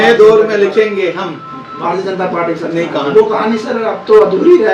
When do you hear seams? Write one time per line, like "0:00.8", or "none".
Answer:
none

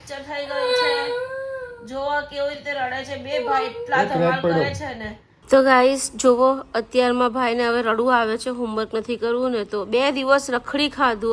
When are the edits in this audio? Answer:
0:05.5

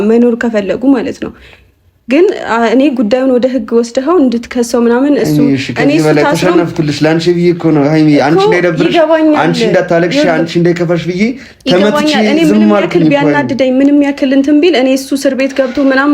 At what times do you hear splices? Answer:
none

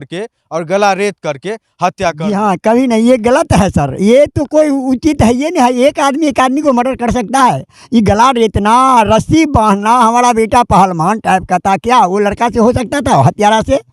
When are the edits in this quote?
0:02.3

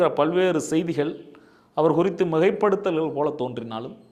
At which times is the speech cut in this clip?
none

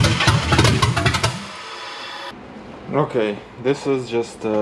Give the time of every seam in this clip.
0:02.3

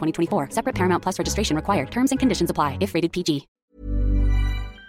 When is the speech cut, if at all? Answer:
0:03.5

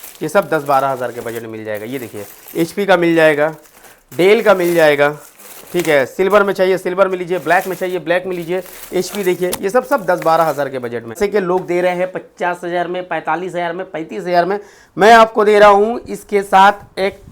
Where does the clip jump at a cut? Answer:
0:11.2

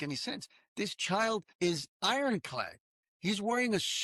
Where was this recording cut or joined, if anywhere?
0:01.5

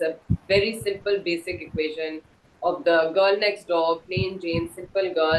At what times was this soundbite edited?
none

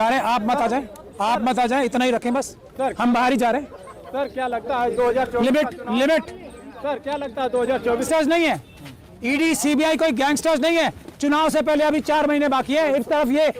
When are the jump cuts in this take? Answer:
0:08.1

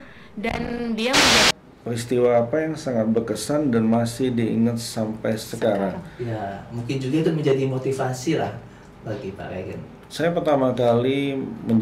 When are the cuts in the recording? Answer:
0:01.4

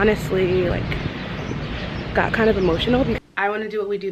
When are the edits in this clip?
0:03.2

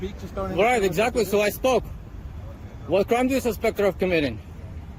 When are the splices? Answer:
none

